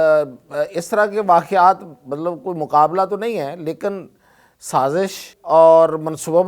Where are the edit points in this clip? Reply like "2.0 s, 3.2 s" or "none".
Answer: 5.3 s